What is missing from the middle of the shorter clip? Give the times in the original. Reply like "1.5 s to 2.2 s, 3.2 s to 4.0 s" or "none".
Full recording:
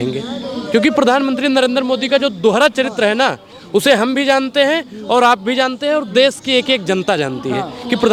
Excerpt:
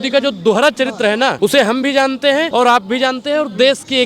3.3 s to 3.7 s, 4.8 s to 5.0 s

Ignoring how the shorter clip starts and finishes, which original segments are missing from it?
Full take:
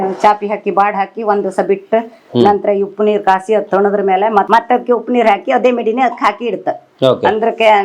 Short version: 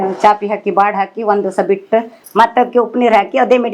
2.3 s to 4.5 s

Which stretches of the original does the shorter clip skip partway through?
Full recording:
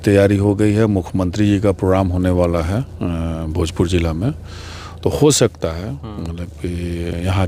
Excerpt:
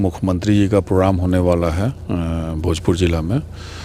none

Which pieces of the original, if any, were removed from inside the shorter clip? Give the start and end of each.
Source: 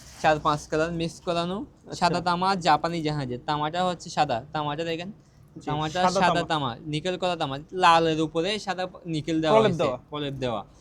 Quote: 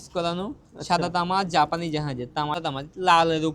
3.7 s to 7.3 s

